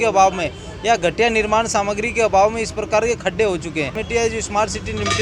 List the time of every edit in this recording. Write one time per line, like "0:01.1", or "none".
0:04.0